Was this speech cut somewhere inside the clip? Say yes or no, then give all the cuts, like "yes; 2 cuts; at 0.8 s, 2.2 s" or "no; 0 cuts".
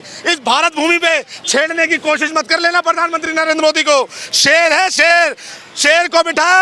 no; 0 cuts